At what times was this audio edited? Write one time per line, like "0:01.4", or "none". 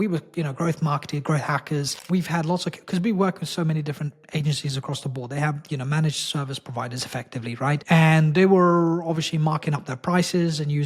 0:02.0
0:07.8

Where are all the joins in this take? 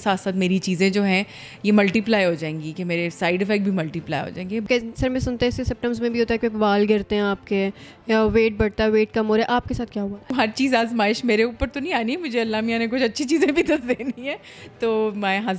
0:04.7
0:10.3

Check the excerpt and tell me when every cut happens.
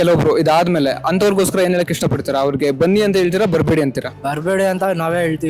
0:04.1

